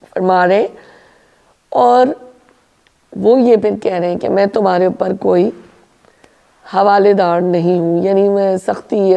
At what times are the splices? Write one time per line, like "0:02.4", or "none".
none